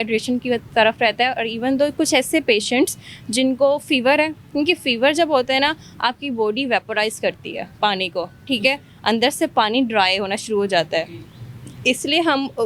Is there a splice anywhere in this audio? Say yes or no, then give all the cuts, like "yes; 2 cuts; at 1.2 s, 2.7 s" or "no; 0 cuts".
no; 0 cuts